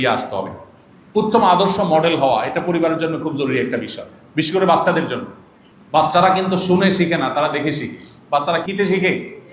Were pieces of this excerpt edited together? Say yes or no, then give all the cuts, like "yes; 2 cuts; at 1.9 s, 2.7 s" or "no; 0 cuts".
yes; 1 cut; at 8.6 s